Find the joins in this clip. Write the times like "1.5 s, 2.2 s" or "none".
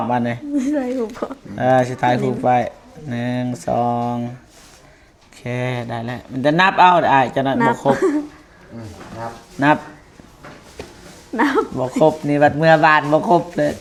none